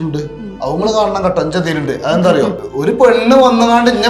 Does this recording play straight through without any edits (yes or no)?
no